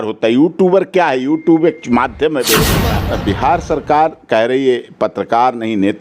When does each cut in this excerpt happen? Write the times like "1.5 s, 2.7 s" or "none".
2.9 s